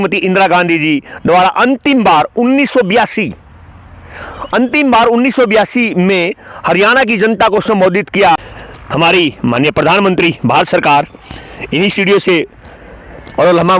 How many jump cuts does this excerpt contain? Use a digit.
1